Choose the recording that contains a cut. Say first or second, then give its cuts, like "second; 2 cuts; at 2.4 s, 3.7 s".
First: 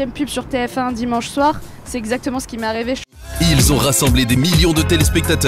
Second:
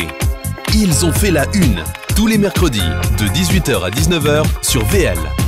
first; 1 cut; at 3.1 s